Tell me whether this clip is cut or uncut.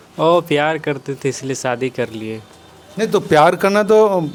uncut